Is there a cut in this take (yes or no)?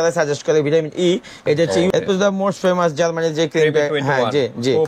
yes